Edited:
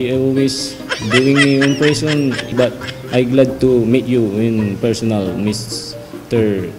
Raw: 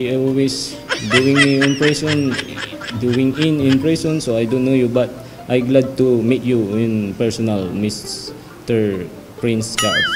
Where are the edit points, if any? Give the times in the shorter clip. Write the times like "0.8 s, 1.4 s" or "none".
2.5 s